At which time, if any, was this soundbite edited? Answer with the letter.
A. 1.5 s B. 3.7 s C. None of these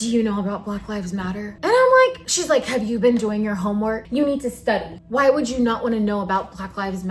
C